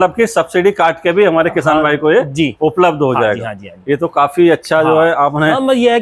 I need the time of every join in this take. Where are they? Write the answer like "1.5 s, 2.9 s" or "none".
none